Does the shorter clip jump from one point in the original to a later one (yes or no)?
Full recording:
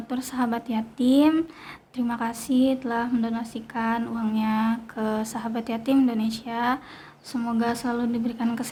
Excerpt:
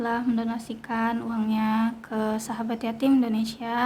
no